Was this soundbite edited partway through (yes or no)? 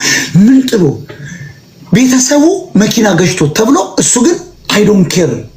no